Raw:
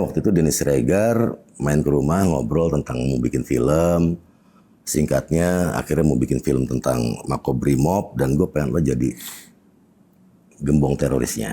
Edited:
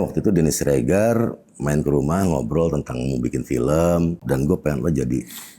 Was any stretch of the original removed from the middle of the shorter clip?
yes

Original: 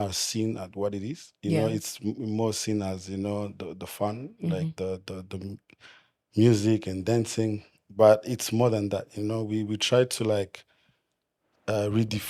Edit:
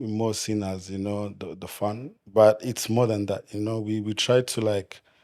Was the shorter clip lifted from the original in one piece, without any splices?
no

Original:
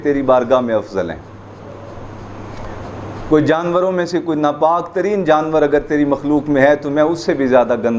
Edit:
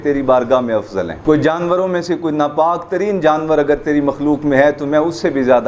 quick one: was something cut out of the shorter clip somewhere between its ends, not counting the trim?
yes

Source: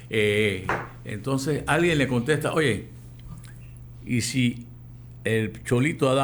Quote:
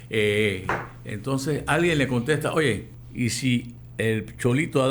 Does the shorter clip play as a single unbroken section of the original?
no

